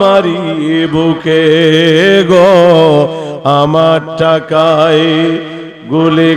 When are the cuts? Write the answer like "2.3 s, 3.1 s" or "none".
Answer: none